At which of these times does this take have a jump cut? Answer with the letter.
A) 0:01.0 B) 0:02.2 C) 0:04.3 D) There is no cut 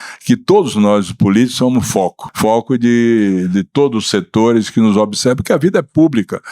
B